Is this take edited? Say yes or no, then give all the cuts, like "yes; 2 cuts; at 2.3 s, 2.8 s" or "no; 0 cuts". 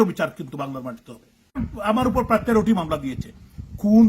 yes; 1 cut; at 1.7 s